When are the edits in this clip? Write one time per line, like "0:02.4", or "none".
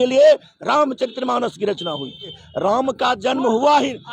0:02.4